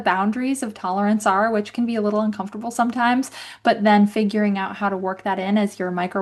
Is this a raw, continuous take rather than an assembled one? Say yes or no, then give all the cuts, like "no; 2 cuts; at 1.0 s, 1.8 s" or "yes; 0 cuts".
yes; 0 cuts